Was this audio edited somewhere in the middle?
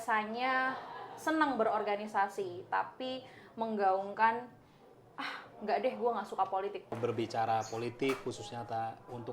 yes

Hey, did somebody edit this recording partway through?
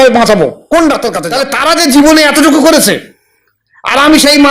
yes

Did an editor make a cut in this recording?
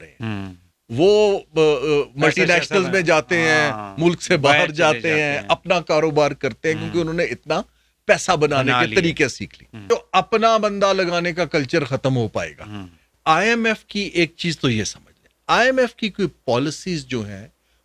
yes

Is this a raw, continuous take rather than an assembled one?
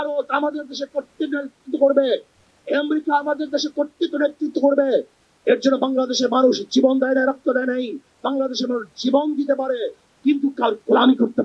no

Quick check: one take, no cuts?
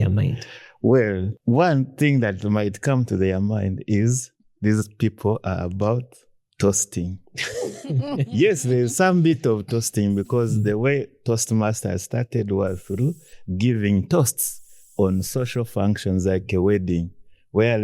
no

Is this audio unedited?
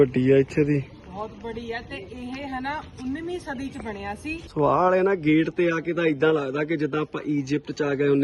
no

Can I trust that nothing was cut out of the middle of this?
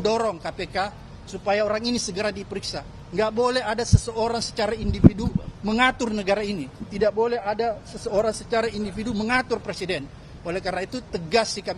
yes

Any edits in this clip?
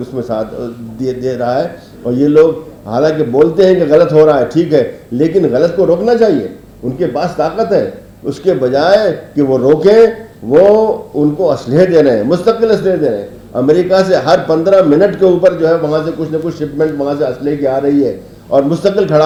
no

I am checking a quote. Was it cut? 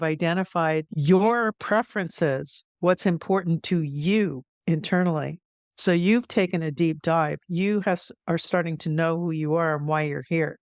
yes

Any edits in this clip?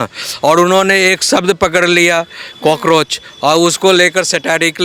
no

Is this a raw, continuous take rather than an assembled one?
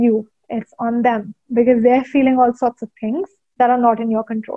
no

